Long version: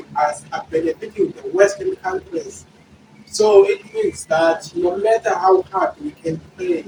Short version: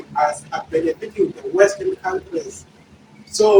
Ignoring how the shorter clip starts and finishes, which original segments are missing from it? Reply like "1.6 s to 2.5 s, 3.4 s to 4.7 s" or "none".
none